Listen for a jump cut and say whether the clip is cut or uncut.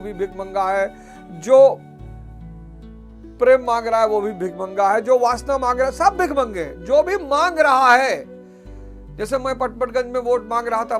cut